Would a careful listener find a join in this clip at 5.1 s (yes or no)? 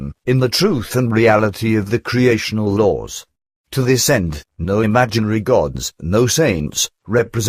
yes